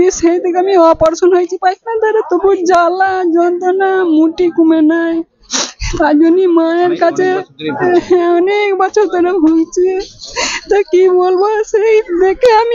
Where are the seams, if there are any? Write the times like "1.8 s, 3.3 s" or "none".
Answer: none